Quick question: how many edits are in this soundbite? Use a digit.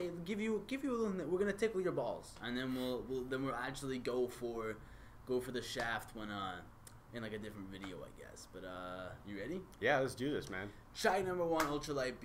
1